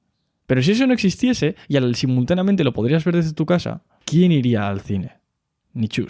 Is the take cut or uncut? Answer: cut